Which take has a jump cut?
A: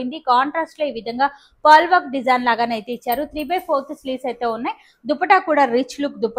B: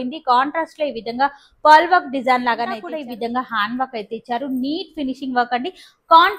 B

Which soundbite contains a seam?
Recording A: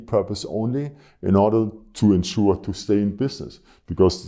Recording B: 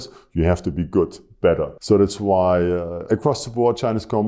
B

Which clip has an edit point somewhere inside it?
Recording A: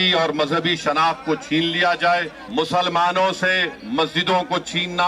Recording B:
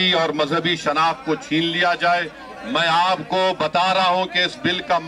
A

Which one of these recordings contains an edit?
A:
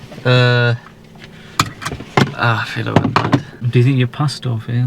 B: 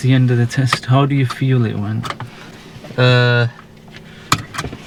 A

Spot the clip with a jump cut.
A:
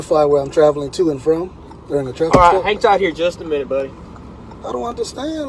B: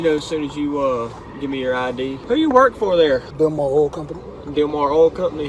B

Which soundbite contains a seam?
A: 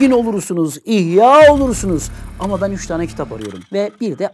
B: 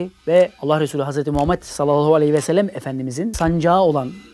B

